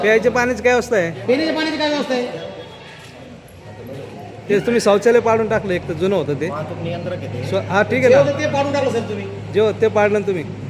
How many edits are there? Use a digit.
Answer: 1